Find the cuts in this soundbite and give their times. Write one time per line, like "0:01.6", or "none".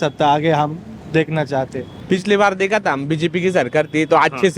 0:02.0